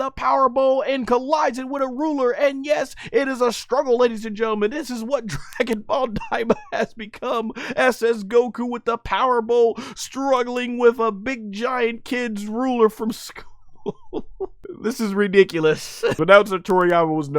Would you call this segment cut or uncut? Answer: cut